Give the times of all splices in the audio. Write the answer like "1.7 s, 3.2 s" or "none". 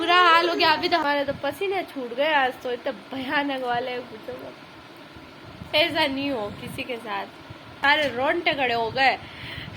1.0 s, 5.7 s, 7.7 s